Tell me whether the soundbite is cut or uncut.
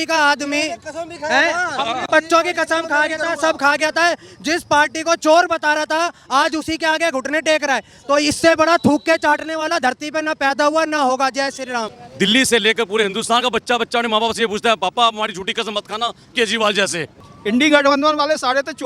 cut